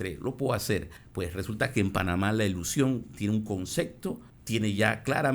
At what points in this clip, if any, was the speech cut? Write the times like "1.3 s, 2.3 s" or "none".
1.0 s, 4.3 s